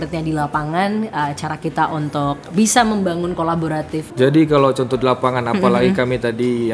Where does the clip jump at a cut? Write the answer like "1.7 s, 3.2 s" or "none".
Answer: 4.0 s

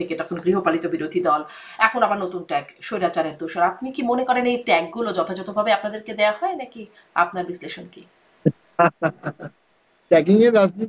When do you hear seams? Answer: none

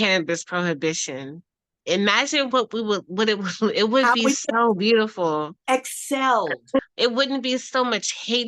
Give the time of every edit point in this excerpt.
6.8 s

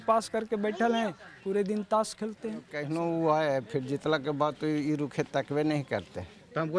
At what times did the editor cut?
2.8 s

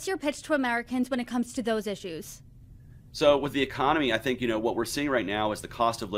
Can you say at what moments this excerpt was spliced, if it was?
1.6 s

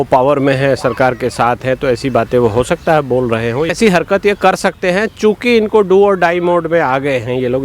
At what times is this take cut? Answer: 3.7 s

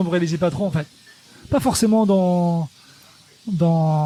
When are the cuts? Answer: none

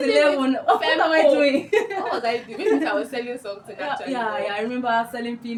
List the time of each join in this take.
none

